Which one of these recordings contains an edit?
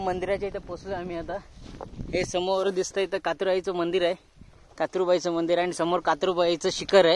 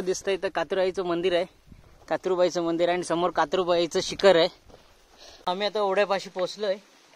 second; 1 cut; at 5.5 s

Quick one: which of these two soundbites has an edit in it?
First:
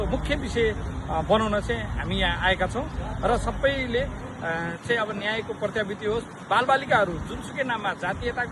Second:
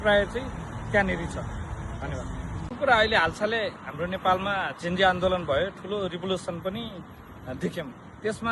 second; 1 cut; at 2.6 s

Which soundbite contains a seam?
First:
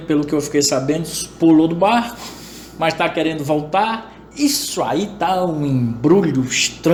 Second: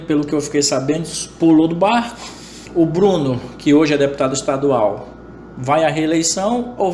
second; 1 cut; at 2.6 s

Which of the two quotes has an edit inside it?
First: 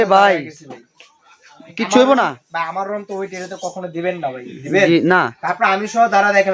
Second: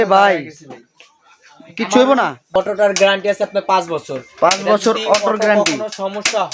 second; 1 cut; at 2.6 s

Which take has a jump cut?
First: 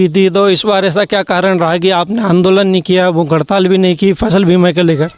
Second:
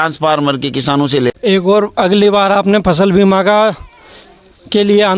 second; 1 cut; at 1.3 s

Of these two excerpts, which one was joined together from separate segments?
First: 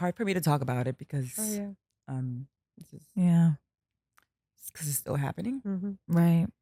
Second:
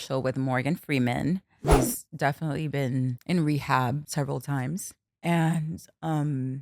second; 4 cuts; at 1.6 s, 3.2 s, 4.1 s, 5.0 s

